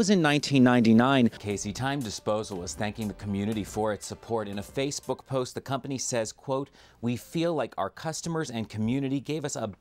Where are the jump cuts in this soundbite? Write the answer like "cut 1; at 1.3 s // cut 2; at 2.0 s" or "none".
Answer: cut 1; at 1.4 s